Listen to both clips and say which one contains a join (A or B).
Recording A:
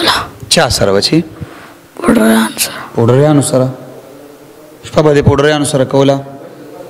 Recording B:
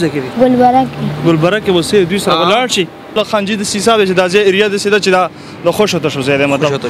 B